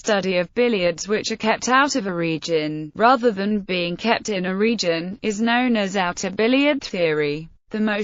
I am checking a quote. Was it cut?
yes; 1 cut; at 7.1 s

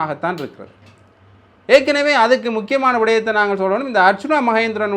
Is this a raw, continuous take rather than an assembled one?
yes; 0 cuts

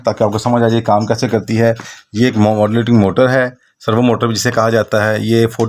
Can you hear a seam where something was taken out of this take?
no; 0 cuts

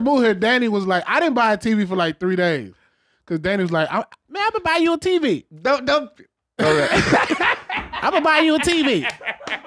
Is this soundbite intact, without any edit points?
yes; 0 cuts

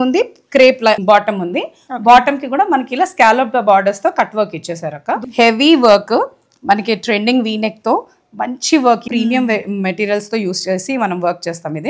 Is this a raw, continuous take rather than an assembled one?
no; 3 cuts; at 1.0 s, 5.3 s, 9.1 s

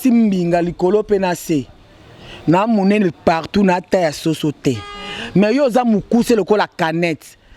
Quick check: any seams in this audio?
no; 0 cuts

